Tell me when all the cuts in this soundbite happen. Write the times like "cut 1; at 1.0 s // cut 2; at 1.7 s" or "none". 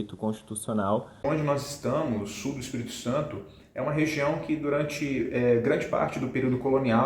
cut 1; at 1.1 s